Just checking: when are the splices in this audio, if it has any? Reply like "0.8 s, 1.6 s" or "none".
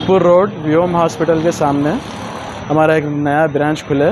none

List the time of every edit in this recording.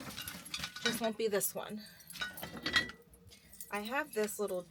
none

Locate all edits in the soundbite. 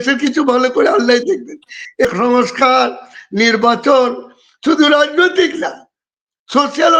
2.1 s

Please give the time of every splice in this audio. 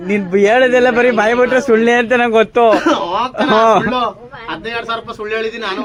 none

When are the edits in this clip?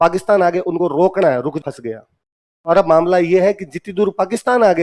1.6 s

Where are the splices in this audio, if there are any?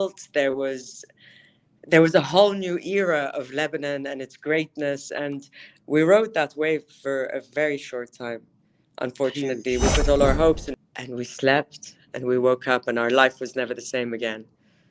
10.7 s

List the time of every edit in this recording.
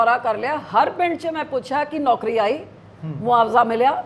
none

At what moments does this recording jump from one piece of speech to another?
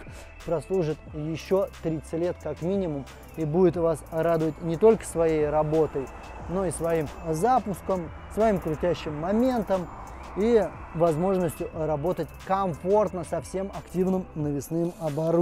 none

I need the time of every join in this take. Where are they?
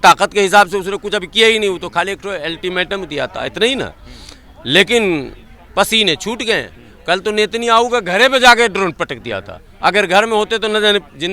none

